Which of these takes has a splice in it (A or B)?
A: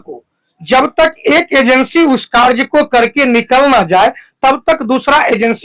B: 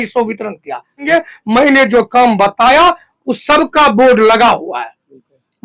B